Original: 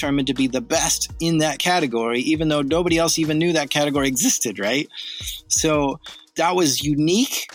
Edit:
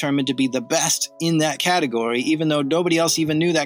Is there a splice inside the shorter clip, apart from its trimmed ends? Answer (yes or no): no